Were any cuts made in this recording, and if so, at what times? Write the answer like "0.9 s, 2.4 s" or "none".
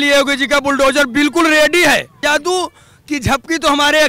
2.2 s